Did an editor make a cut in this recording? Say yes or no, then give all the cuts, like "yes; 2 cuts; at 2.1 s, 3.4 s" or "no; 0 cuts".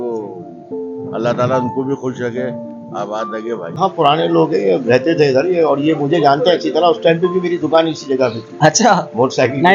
yes; 1 cut; at 3.8 s